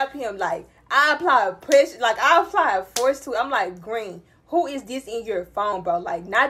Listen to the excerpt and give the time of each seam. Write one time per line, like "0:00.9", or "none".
none